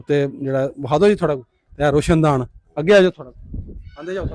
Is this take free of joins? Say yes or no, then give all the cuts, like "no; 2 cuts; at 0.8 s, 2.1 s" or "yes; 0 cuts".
yes; 0 cuts